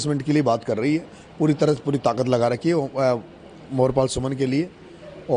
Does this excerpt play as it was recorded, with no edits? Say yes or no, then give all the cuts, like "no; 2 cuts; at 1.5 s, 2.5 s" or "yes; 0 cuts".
yes; 0 cuts